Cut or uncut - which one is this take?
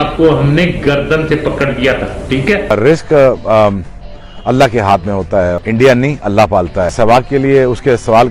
cut